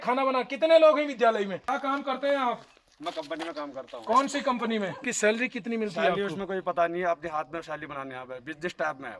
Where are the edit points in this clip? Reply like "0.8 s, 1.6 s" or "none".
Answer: 1.7 s, 5.0 s